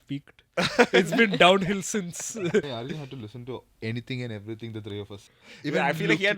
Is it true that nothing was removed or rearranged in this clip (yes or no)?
no